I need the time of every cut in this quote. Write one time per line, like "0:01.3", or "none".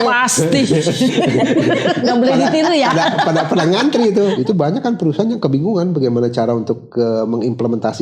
0:04.4